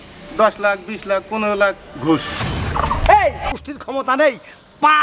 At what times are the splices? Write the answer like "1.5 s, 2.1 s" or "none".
3.5 s